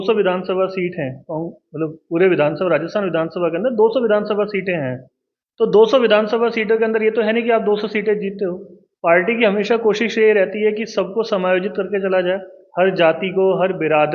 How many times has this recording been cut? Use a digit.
0